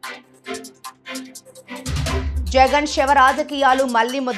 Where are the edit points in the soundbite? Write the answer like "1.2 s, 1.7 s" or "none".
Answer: 2.3 s